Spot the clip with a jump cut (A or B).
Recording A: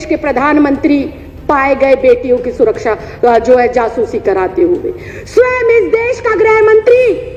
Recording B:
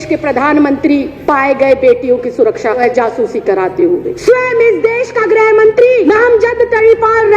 B